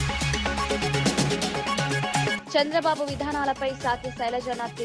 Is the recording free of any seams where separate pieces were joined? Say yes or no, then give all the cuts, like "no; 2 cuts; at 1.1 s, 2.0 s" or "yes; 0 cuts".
no; 2 cuts; at 0.7 s, 2.4 s